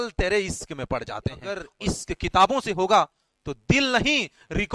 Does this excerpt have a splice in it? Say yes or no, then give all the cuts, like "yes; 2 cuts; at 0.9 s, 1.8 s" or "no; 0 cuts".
yes; 1 cut; at 1.7 s